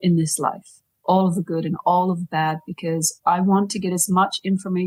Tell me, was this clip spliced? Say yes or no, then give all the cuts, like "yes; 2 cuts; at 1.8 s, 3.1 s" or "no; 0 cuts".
no; 0 cuts